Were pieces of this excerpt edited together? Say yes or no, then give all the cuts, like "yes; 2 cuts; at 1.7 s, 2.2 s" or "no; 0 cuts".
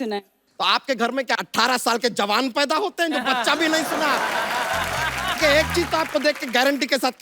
yes; 2 cuts; at 1.4 s, 5.4 s